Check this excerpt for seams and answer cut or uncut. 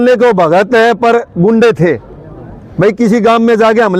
uncut